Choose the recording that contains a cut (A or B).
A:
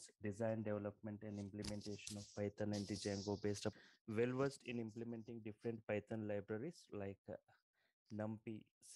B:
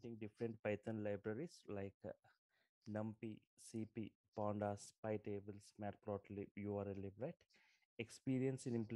A